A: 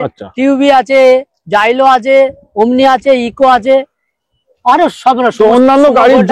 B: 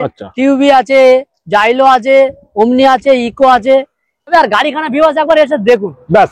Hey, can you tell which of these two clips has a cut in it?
B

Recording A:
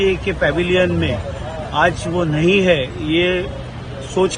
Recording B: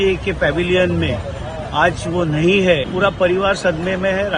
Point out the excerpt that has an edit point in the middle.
B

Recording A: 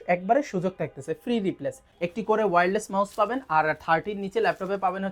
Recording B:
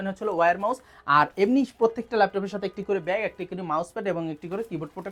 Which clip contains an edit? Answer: A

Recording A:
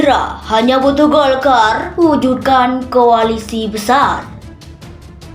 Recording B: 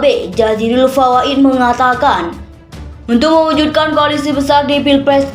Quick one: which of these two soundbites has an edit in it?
A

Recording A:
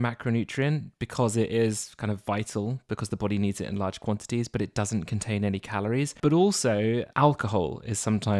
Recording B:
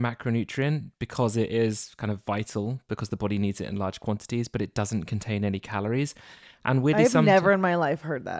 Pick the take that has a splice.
A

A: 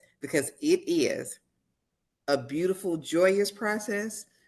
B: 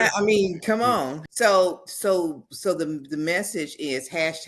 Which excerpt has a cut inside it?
B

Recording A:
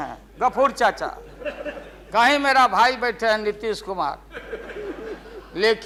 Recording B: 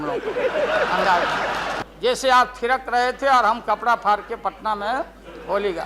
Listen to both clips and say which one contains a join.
B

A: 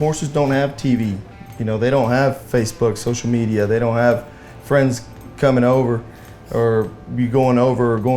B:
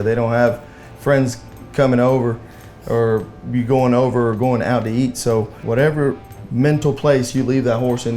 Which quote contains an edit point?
B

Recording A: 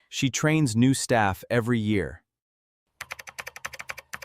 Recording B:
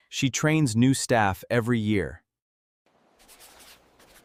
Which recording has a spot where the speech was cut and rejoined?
A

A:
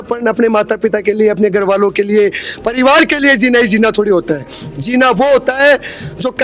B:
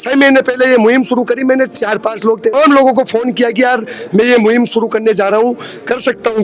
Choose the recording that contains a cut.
B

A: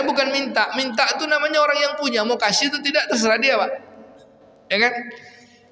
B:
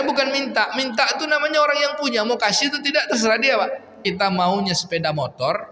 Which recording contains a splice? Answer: B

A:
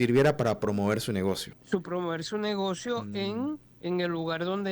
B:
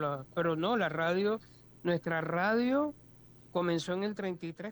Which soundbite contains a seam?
A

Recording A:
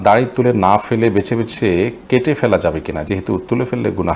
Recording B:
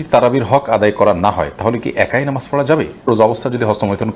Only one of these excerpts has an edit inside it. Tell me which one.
B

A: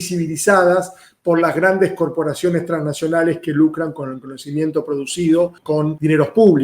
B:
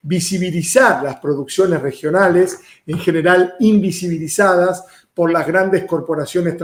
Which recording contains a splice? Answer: A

